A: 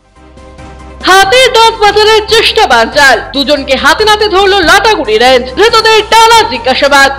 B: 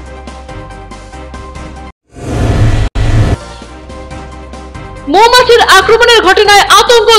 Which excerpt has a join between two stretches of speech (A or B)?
B